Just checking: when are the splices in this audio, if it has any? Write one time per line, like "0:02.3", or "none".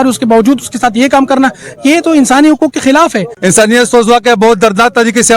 0:03.3